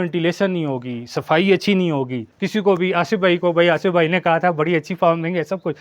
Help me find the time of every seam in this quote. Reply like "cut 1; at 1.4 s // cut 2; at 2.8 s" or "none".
cut 1; at 2.2 s